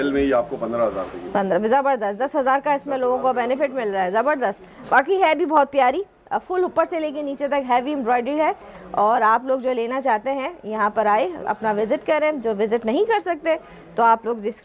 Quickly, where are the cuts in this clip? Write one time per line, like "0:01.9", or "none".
none